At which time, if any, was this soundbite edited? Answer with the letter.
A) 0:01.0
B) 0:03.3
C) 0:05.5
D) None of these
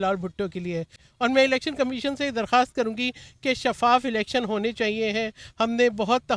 A